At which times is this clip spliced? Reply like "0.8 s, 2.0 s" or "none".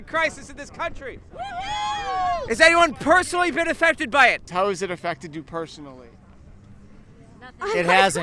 2.4 s, 4.5 s